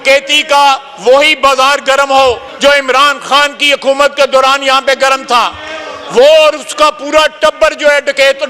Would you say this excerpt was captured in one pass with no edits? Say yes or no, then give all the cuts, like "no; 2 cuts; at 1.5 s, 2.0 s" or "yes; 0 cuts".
no; 1 cut; at 2.5 s